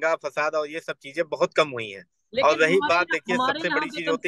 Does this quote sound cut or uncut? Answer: cut